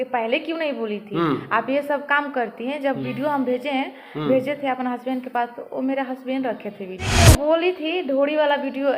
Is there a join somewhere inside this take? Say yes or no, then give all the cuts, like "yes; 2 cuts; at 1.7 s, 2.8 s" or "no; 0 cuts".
yes; 1 cut; at 7.1 s